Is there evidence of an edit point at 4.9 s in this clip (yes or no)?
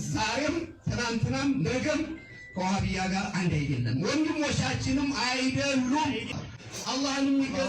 no